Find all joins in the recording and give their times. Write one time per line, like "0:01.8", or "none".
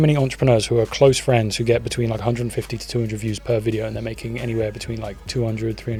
none